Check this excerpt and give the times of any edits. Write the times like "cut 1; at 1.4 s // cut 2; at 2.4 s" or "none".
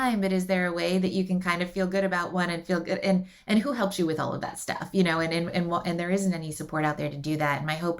none